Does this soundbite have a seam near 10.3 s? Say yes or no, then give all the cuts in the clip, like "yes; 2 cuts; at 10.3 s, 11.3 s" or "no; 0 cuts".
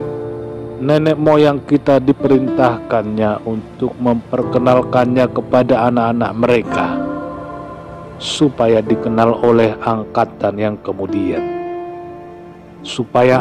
no; 0 cuts